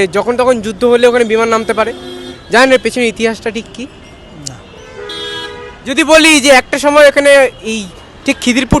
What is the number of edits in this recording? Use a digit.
0